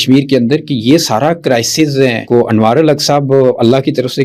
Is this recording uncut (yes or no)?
no